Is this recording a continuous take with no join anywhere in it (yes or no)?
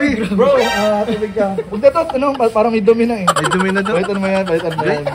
yes